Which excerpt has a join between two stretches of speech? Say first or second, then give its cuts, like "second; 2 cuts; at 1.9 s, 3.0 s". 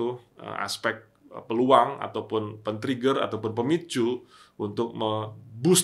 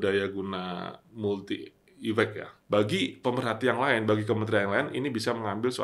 second; 1 cut; at 2.5 s